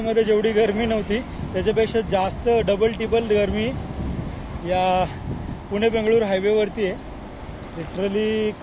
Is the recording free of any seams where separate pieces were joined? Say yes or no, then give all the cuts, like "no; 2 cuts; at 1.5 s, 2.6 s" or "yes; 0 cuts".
yes; 0 cuts